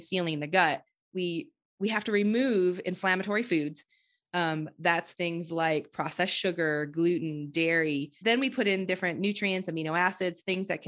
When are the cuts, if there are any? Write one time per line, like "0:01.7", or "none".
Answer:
0:08.1